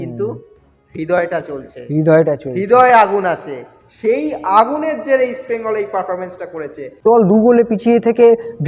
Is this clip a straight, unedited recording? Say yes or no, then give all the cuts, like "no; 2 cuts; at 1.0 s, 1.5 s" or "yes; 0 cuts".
no; 1 cut; at 7.0 s